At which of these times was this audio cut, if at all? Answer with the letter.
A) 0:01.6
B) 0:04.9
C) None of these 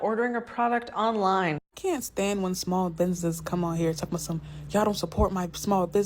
A